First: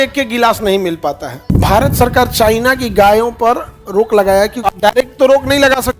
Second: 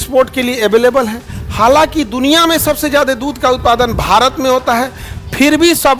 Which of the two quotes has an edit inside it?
first; 2 cuts; at 1.4 s, 4.6 s

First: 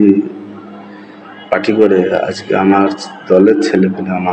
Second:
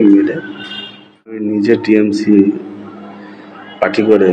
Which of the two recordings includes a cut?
second; 1 cut; at 1.4 s

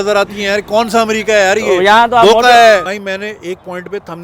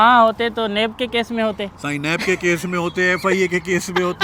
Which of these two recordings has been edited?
first; 1 cut; at 2.9 s

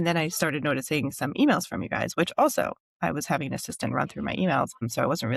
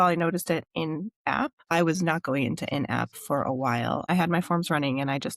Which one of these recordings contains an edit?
second; 1 cut; at 4.1 s

